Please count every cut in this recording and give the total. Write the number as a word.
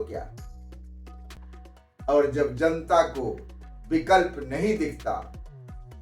zero